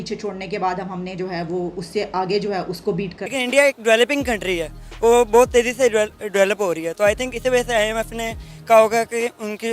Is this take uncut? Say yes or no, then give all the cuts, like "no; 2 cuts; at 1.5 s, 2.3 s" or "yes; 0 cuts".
no; 1 cut; at 3.4 s